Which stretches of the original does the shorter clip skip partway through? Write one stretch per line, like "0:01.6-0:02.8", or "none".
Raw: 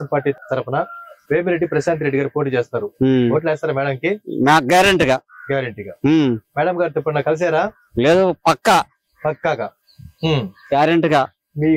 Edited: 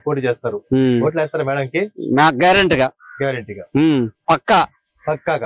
0:06.5-0:08.4